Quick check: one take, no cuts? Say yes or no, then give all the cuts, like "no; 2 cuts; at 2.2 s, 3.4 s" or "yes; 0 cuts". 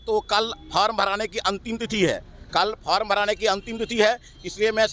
yes; 0 cuts